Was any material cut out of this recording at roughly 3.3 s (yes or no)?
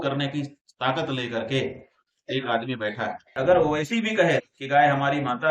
yes